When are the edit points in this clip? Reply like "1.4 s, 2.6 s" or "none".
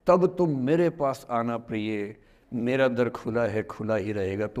none